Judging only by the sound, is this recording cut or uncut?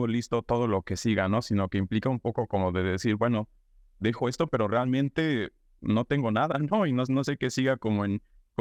uncut